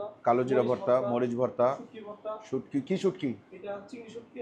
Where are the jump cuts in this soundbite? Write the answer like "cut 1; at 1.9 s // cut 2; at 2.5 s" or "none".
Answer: none